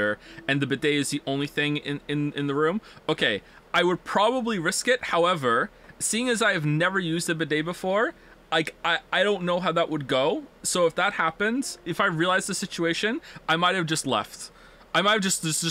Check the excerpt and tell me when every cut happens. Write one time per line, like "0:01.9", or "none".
0:10.6
0:11.8